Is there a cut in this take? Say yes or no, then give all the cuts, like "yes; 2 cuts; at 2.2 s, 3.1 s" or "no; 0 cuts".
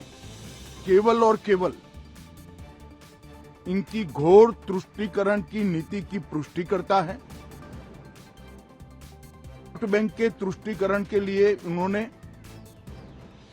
yes; 3 cuts; at 7.2 s, 9.8 s, 12.2 s